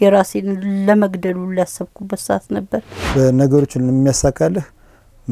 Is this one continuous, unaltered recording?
no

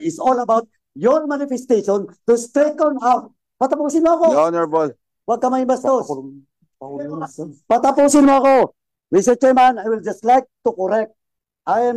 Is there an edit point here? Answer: no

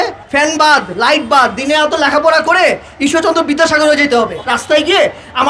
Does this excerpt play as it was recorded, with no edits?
no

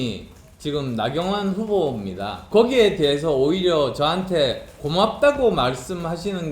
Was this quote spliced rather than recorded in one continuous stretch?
yes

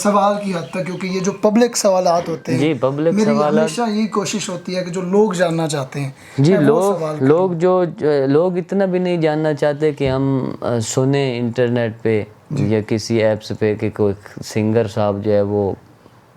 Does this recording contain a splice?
no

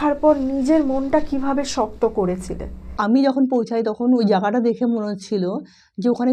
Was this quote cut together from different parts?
yes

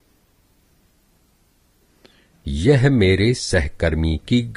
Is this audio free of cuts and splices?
no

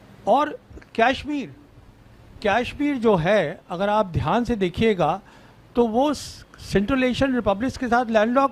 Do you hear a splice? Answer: no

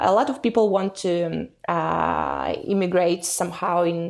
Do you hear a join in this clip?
no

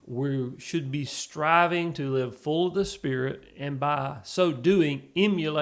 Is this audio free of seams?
yes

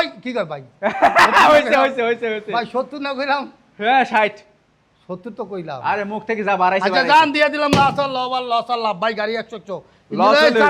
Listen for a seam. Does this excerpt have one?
no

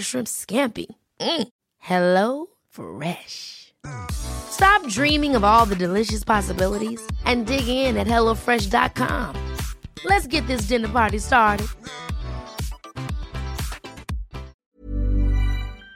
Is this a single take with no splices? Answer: no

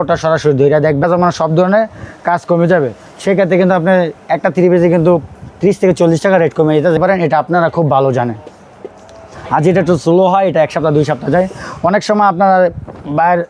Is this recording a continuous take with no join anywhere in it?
no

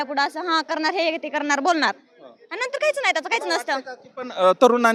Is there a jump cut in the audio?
no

